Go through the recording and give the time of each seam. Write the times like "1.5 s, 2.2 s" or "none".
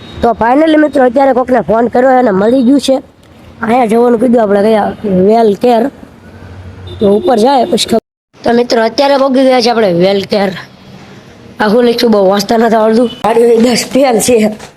8.0 s, 13.2 s